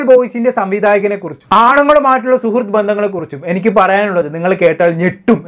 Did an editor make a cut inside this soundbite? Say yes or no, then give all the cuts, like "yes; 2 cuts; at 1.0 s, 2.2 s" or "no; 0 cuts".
no; 0 cuts